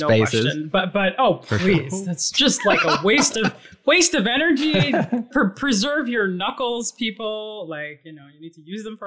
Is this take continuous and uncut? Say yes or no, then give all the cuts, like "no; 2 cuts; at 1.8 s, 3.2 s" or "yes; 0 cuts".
yes; 0 cuts